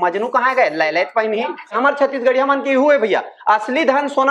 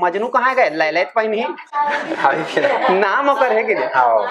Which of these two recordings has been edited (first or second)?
first